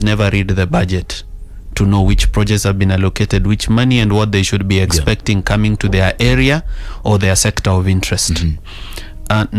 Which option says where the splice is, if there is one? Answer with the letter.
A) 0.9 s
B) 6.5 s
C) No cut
C